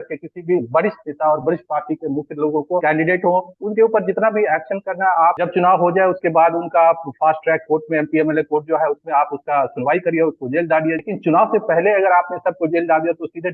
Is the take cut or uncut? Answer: cut